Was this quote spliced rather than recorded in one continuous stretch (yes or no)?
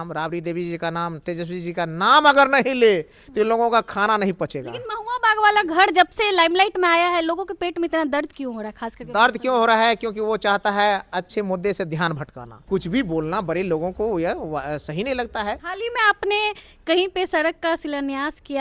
yes